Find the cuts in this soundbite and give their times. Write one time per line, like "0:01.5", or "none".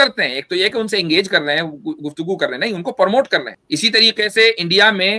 0:03.5